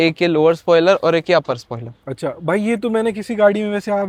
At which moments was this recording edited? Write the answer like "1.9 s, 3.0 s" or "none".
none